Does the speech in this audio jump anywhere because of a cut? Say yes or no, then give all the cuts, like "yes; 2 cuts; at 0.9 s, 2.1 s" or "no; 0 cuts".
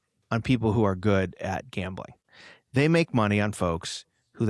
yes; 1 cut; at 2.1 s